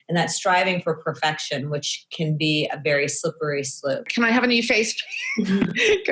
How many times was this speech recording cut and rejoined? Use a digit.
1